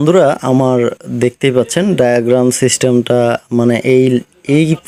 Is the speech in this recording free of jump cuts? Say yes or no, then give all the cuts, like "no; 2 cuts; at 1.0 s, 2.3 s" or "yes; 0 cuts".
yes; 0 cuts